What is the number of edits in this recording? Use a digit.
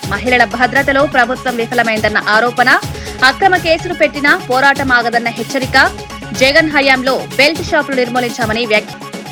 0